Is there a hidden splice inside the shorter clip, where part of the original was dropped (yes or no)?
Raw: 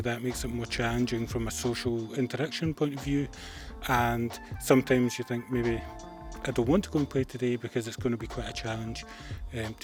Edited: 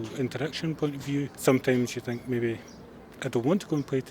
yes